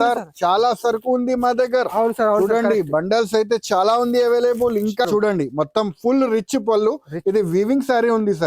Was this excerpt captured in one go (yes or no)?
no